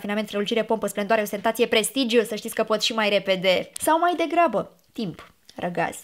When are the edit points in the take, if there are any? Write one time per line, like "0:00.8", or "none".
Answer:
0:03.7